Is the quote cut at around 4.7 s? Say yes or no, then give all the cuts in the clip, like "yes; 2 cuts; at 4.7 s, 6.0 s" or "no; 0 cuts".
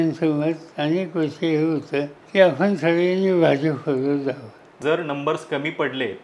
yes; 2 cuts; at 2.2 s, 4.7 s